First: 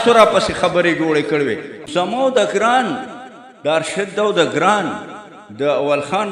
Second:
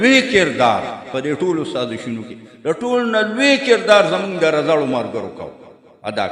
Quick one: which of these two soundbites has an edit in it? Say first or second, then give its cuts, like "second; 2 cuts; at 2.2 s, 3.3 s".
first; 1 cut; at 1.8 s